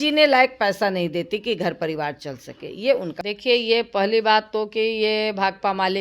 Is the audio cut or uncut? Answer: cut